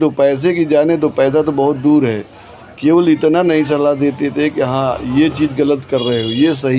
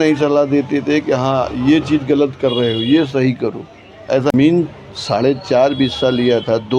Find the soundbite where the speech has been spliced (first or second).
second